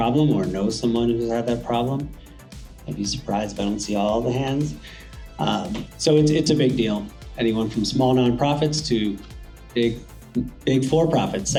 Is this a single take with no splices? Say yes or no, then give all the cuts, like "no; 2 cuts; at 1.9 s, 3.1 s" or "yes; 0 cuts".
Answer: yes; 0 cuts